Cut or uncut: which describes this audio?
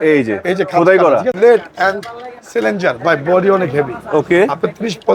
cut